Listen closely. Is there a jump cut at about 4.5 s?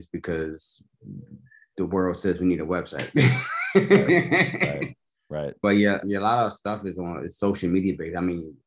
no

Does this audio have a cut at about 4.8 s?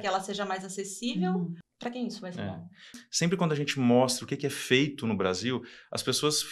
no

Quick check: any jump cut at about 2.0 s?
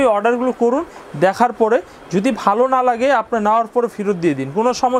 no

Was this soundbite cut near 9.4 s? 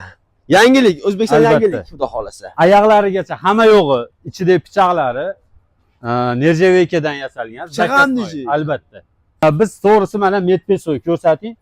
yes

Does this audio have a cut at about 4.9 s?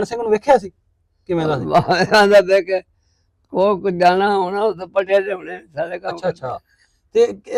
no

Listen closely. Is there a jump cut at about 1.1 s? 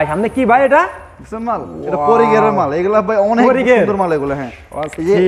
no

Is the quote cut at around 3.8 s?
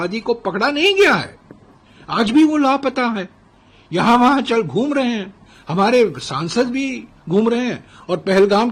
no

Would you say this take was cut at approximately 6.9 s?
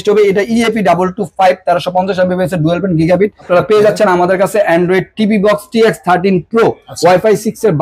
yes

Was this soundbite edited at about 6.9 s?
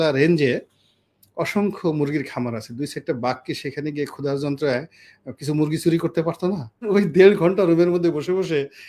yes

